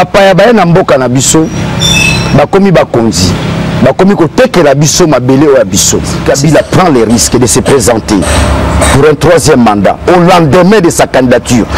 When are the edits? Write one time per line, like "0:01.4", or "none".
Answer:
0:06.2